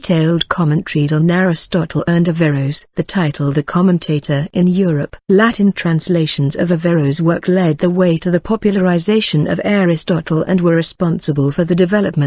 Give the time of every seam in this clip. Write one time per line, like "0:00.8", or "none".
0:04.7